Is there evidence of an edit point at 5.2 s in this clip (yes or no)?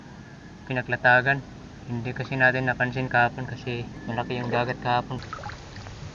yes